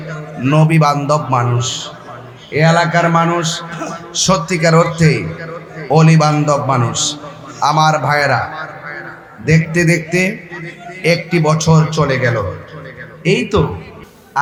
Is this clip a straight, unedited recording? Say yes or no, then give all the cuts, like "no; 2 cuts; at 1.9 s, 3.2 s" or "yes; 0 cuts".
yes; 0 cuts